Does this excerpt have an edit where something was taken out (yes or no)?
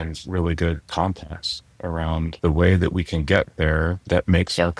yes